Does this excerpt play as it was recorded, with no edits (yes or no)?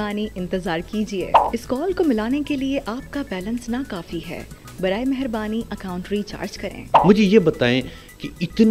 no